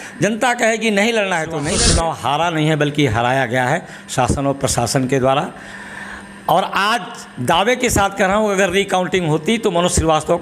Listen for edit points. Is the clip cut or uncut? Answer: cut